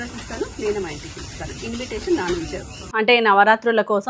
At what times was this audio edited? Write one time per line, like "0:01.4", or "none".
0:02.8